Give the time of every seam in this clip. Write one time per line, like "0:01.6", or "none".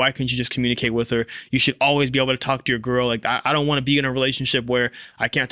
none